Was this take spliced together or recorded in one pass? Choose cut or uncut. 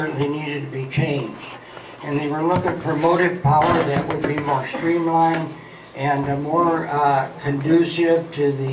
uncut